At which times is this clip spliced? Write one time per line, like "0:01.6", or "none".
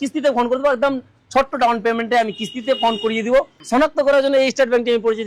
0:03.6